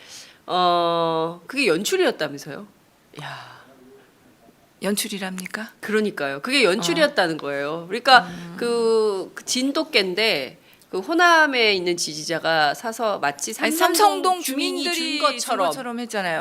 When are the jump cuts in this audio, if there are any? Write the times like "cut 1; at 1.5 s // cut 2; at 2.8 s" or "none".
cut 1; at 10.5 s